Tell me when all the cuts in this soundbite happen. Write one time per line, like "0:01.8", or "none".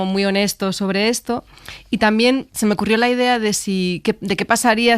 0:02.5